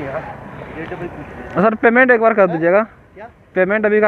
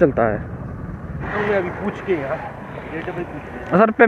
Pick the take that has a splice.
second; 1 cut; at 1.2 s

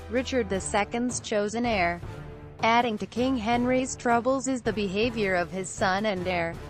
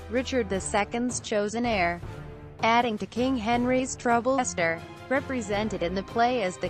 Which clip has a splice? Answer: first; 1 cut; at 4.4 s

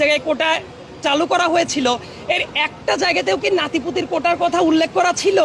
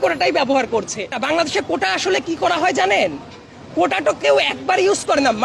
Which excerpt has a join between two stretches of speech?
second; 1 cut; at 1.1 s

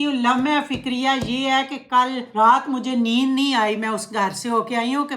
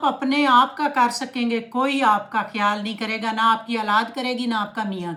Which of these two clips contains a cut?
first; 1 cut; at 2.2 s

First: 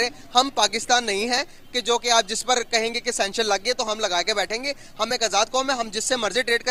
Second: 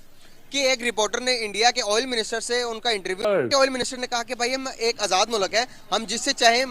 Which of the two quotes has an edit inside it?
second; 1 cut; at 3.3 s

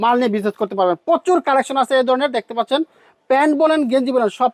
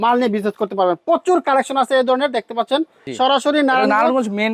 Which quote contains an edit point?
second; 1 cut; at 3.0 s

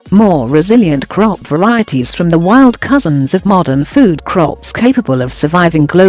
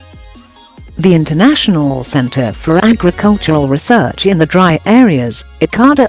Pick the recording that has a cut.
second; 1 cut; at 0.9 s

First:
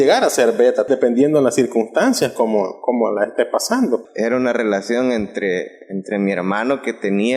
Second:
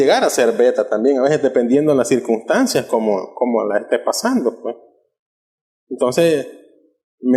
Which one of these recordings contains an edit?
first; 2 cuts; at 0.9 s, 4.1 s

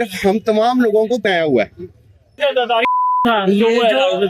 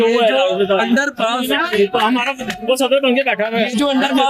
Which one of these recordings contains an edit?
first; 2 cuts; at 1.2 s, 2.4 s

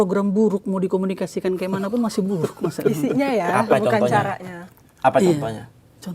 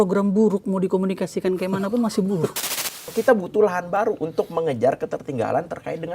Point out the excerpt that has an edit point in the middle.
second; 1 cut; at 2.5 s

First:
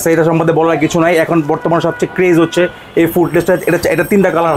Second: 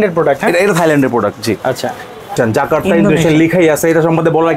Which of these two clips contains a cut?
second; 1 cut; at 2.3 s

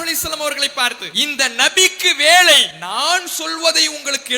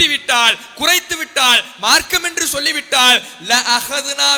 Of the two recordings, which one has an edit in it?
first; 2 cuts; at 1.1 s, 2.8 s

